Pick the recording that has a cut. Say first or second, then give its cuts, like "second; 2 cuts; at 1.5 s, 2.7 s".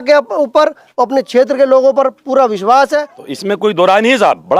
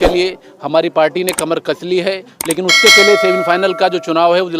first; 1 cut; at 3.2 s